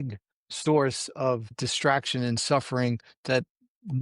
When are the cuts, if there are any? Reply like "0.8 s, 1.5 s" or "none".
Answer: 1.6 s